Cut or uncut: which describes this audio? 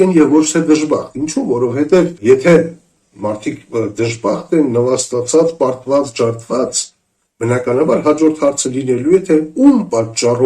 cut